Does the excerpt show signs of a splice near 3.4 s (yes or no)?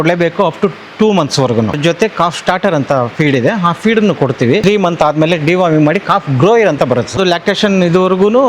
no